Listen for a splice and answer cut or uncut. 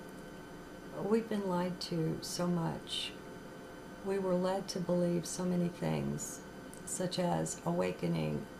cut